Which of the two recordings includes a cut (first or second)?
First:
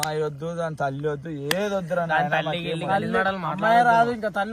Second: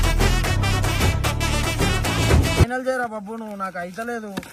second